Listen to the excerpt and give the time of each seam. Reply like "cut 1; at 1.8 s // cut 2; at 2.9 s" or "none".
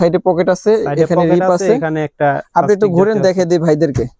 none

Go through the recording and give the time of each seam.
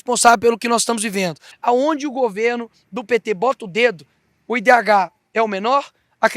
cut 1; at 1.5 s

